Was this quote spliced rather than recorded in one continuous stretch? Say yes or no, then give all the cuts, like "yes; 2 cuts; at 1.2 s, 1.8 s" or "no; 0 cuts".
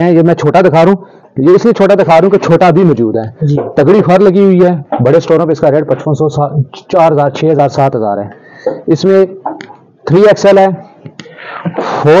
no; 0 cuts